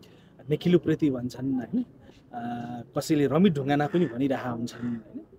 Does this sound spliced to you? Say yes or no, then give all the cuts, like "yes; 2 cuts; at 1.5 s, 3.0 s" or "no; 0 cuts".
no; 0 cuts